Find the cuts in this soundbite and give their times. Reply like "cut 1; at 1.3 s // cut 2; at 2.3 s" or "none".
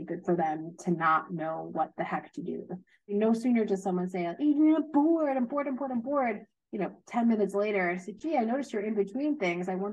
cut 1; at 3.1 s